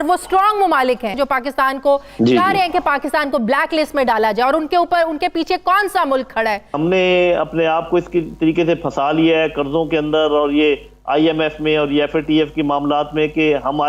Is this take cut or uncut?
cut